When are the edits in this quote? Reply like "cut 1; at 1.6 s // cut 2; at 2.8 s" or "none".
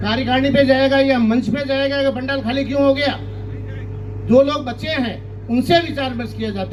none